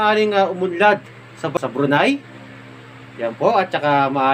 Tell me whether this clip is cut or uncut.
cut